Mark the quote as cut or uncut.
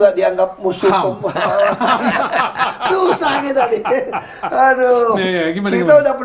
uncut